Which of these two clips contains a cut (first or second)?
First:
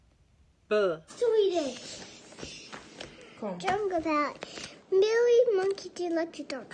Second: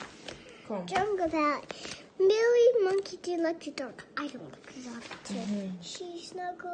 first